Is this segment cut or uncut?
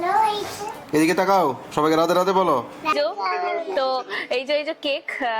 cut